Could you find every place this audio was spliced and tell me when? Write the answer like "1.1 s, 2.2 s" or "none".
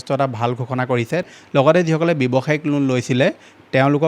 1.3 s